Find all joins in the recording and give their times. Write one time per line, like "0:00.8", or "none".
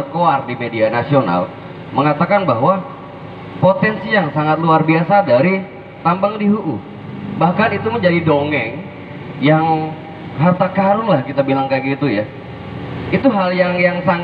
none

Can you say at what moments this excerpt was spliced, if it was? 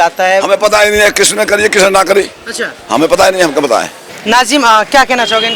0:04.1

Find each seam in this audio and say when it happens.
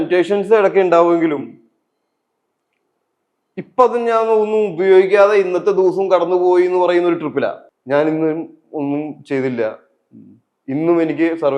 0:07.7

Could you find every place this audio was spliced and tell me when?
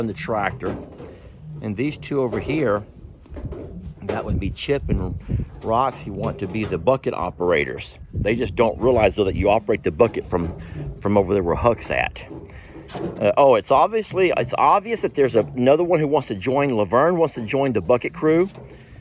none

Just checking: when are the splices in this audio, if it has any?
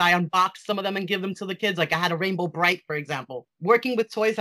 0:03.4

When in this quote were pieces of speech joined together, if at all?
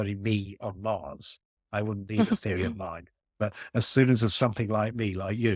none

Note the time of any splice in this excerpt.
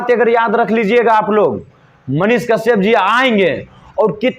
none

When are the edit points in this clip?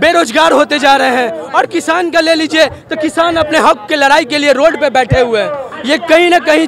0:05.7

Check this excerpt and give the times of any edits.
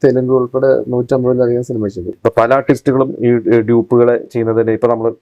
0:02.0

